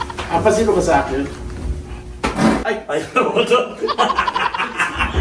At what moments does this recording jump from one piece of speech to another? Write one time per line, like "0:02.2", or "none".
none